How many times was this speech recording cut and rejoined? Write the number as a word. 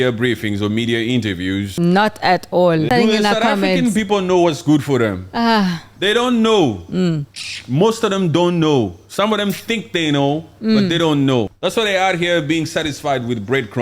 three